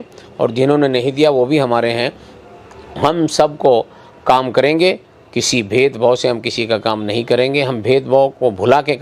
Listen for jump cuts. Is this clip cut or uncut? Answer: uncut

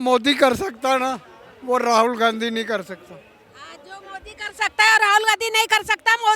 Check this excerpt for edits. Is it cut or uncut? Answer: uncut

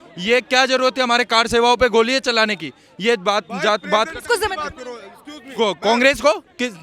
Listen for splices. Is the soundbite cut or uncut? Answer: uncut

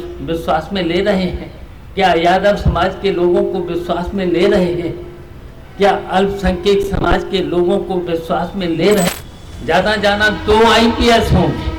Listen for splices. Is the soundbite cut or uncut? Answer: cut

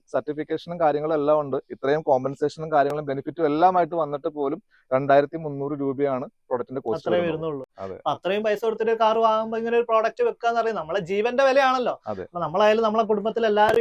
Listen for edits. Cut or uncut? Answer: uncut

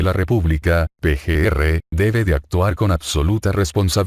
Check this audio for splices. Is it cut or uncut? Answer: cut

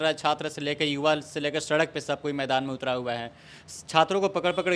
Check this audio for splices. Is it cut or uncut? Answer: uncut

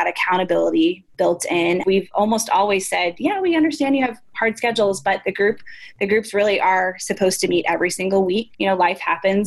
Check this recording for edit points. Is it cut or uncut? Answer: cut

